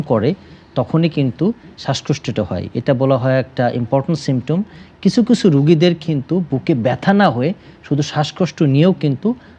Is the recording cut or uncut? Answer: uncut